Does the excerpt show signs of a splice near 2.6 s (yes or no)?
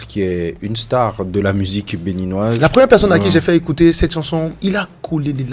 yes